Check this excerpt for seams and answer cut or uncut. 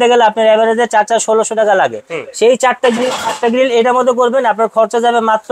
uncut